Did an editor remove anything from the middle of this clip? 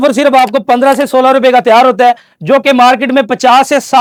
no; 0 cuts

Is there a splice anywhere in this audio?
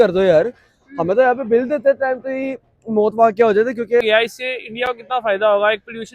yes; 1 cut; at 4.0 s

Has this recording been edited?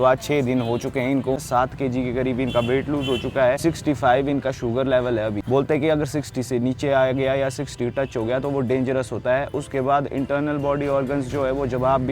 yes; 3 cuts; at 1.4 s, 3.6 s, 5.4 s

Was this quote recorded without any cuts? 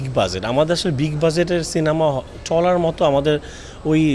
yes; 0 cuts

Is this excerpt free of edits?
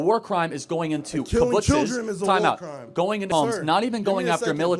no; 1 cut; at 3.3 s

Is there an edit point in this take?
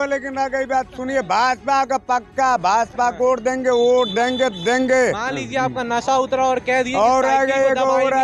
no; 0 cuts

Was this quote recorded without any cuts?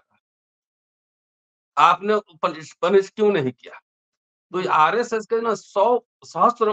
yes; 0 cuts

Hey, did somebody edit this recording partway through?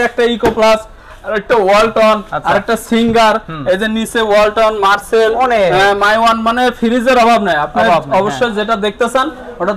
no; 0 cuts

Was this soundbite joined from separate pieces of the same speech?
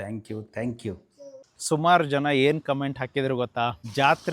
yes; 1 cut; at 1.4 s

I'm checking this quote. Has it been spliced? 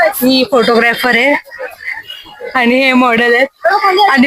no; 0 cuts

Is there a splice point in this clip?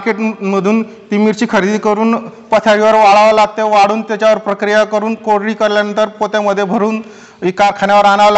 no; 0 cuts

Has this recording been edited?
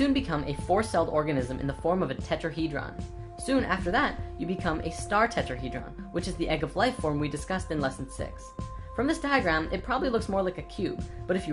no; 0 cuts

